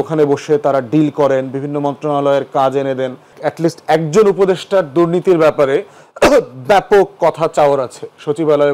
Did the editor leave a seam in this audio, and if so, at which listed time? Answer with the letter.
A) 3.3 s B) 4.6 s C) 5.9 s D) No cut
A